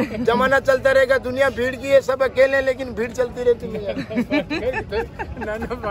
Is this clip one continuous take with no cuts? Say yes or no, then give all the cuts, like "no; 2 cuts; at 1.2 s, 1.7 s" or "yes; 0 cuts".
yes; 0 cuts